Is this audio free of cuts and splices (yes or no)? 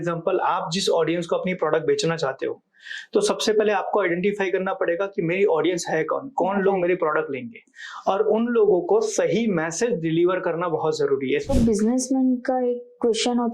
no